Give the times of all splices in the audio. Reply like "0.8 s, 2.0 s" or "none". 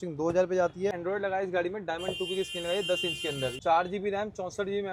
1.0 s, 3.6 s